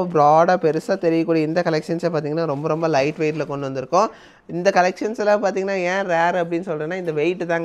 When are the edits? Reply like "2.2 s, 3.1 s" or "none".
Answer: none